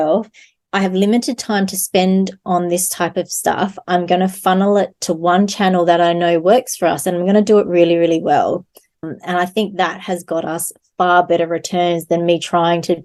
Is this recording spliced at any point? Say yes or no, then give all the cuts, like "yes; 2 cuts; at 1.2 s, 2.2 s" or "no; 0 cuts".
no; 0 cuts